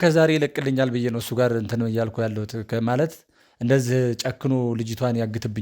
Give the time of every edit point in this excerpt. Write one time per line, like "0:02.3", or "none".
none